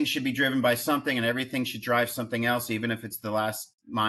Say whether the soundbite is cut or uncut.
uncut